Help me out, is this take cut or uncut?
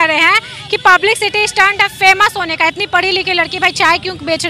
uncut